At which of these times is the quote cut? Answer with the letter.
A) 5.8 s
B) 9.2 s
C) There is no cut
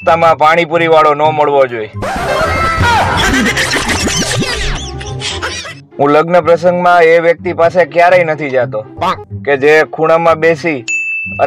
A